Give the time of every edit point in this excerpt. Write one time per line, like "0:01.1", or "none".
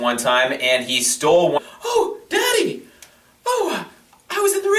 none